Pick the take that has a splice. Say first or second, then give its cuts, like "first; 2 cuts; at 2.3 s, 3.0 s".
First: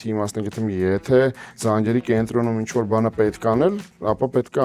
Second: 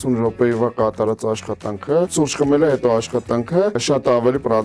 second; 2 cuts; at 2.1 s, 3.8 s